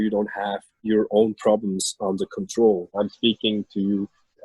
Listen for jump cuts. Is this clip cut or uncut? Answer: cut